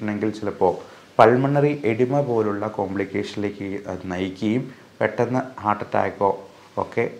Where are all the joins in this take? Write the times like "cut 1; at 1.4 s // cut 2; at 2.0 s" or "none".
none